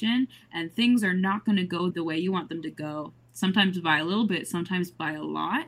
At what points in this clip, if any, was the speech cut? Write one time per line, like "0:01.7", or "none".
0:01.8

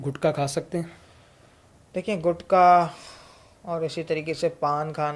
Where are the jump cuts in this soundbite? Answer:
none

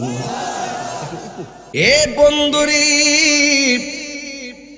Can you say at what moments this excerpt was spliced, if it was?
0:01.6

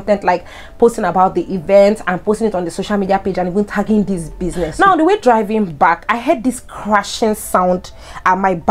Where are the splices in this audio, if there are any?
0:04.7

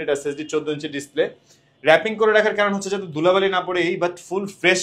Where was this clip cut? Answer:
none

